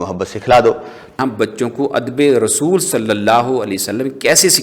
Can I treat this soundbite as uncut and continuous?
no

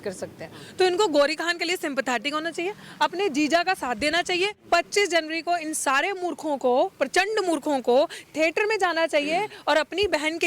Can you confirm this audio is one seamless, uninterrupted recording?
no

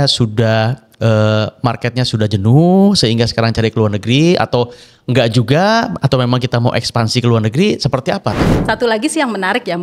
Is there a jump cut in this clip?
yes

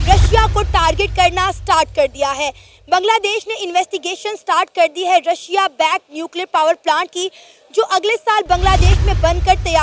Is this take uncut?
yes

